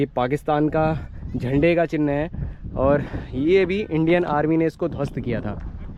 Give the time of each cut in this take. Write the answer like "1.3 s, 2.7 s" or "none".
none